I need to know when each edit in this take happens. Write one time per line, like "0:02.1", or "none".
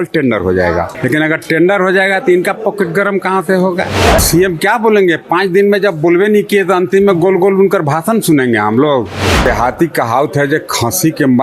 0:01.0
0:04.2
0:09.4

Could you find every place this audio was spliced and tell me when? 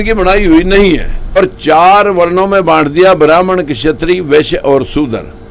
0:01.4

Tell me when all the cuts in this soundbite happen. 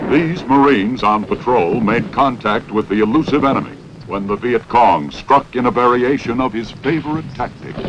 0:06.1

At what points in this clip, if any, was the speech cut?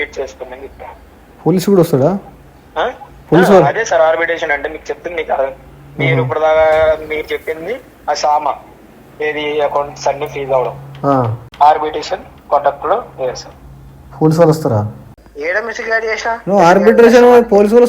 0:11.4
0:15.2

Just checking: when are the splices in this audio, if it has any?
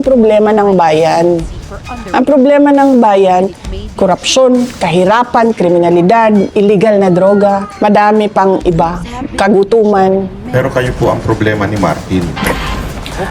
0:06.5
0:07.7
0:10.4

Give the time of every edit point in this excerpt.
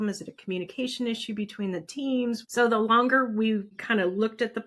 0:02.4
0:03.8

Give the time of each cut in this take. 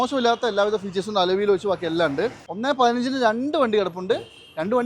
0:02.5

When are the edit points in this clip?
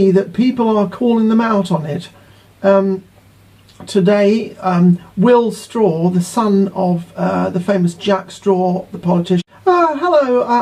none

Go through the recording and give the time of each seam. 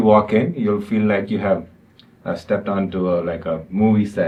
none

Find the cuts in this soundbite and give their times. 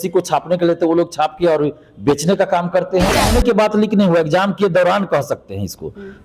0:03.3

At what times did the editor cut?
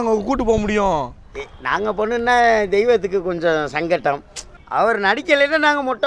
0:04.4

